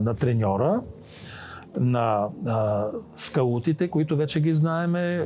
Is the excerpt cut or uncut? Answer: uncut